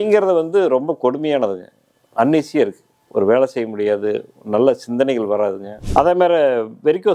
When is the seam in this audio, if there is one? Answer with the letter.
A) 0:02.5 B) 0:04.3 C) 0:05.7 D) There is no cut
C